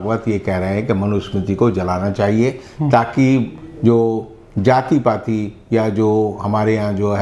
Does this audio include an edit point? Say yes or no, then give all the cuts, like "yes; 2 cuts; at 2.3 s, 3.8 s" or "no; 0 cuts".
no; 0 cuts